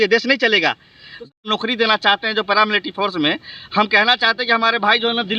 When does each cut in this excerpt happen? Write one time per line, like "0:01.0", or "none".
0:01.3